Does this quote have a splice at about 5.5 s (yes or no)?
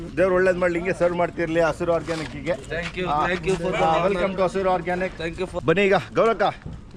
no